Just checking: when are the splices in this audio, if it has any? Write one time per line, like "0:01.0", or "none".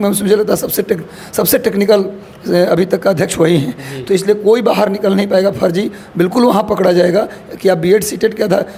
none